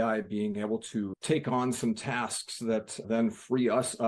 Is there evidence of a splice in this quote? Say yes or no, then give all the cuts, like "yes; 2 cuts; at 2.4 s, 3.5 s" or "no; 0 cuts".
no; 0 cuts